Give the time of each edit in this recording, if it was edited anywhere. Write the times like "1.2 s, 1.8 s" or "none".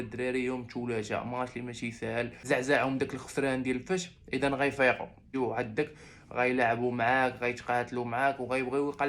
2.4 s, 5.3 s